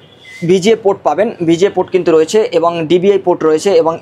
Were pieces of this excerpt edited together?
no; 0 cuts

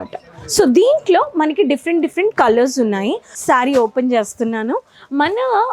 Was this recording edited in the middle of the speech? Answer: yes; 1 cut; at 3.3 s

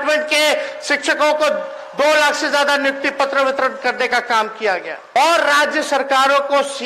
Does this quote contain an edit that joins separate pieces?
yes; 1 cut; at 5.2 s

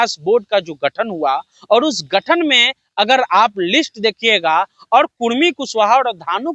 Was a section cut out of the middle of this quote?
no; 0 cuts

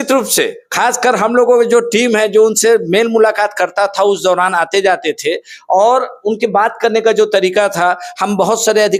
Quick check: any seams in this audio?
no; 0 cuts

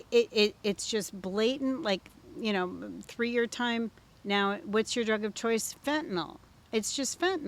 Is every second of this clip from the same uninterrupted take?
yes; 0 cuts

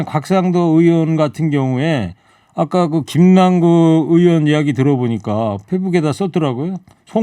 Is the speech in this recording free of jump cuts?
yes; 0 cuts

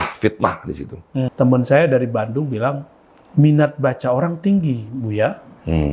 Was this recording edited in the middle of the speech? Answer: yes; 1 cut; at 1.3 s

